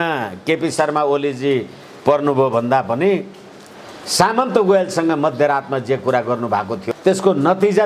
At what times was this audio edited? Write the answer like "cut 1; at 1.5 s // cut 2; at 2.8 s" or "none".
cut 1; at 6.8 s